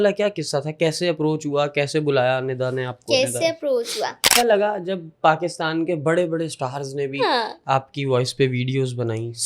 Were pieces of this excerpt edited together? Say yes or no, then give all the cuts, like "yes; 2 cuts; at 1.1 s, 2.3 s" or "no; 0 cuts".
yes; 1 cut; at 4.3 s